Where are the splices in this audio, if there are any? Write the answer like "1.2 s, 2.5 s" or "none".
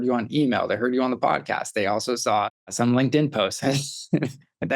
2.7 s